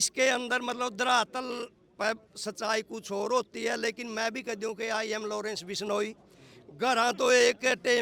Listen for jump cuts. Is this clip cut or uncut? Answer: uncut